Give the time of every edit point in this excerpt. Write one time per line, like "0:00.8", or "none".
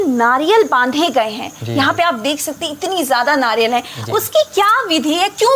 none